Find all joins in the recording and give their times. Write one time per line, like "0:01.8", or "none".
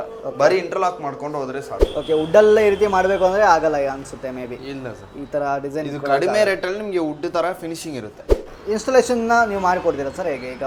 0:01.8
0:08.5